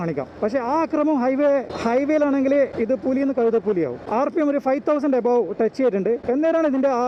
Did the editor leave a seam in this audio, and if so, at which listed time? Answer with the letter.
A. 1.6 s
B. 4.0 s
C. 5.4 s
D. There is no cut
D